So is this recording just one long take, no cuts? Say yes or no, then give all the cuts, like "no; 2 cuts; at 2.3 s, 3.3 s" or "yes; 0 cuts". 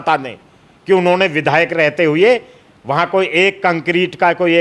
yes; 0 cuts